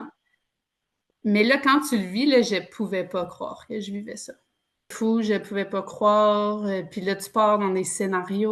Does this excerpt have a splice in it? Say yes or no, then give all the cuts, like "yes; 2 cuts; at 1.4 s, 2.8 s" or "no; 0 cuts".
yes; 1 cut; at 4.9 s